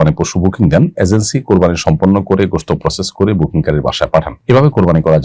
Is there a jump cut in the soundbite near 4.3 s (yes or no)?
yes